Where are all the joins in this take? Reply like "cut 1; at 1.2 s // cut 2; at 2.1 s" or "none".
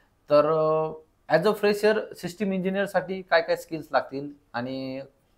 none